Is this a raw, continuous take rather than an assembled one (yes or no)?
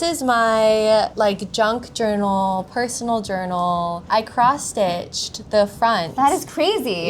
no